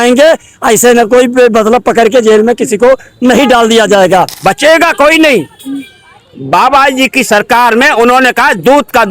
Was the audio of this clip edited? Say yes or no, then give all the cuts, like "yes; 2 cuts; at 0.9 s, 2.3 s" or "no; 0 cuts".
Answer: yes; 1 cut; at 4.3 s